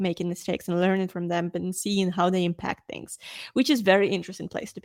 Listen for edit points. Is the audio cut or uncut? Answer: uncut